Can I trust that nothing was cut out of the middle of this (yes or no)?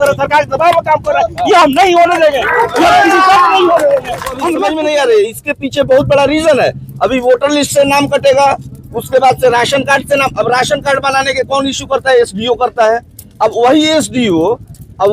no